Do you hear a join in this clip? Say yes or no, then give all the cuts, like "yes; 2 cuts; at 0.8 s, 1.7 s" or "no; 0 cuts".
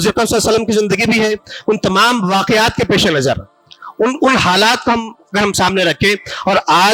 no; 0 cuts